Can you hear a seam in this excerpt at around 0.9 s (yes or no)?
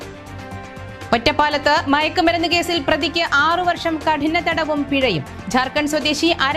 yes